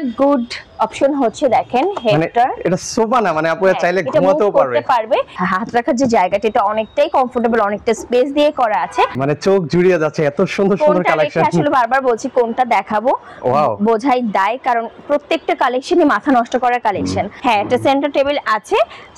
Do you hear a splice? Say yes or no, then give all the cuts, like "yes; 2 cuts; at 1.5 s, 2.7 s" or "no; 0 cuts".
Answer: yes; 3 cuts; at 5.3 s, 9.2 s, 17.3 s